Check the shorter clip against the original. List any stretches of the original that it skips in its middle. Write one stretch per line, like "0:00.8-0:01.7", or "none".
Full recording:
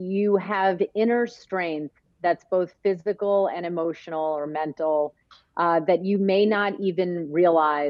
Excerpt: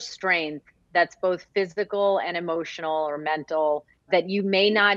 0:05.4-0:05.8

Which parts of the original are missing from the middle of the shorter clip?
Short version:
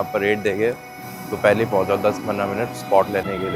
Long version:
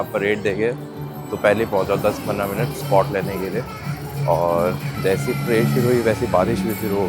none

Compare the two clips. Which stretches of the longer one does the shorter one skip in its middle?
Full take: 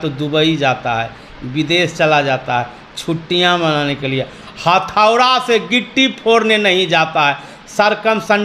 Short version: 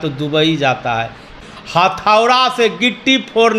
0:01.8-0:04.7

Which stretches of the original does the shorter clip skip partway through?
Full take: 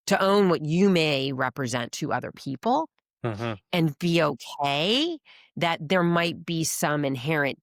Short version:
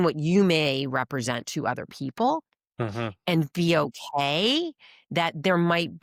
none

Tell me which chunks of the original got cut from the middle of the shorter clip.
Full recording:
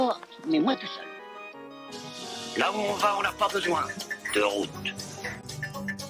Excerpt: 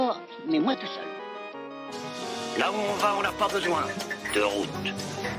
none

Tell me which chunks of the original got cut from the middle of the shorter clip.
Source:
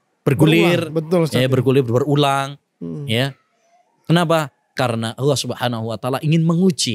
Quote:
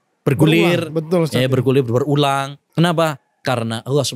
0:02.6-0:03.9

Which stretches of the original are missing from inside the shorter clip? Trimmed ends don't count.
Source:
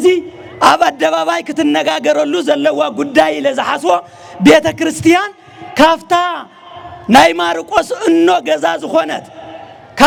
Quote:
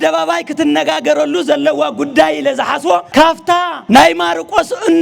0:04.2-0:06.4

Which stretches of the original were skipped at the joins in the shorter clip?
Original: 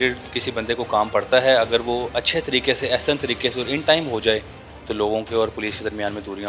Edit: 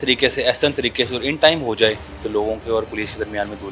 0:04.6-0:04.8

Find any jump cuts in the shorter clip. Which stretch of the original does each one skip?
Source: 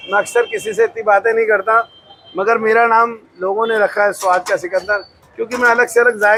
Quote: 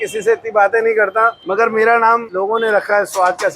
0:01.9-0:02.3
0:03.2-0:03.3

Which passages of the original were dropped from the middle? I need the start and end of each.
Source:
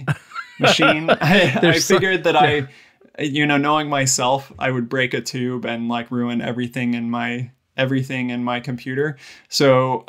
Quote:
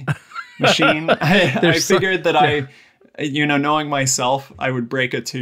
none

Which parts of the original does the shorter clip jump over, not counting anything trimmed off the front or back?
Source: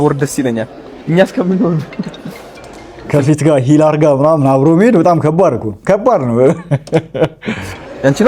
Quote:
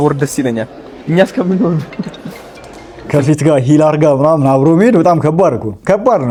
none

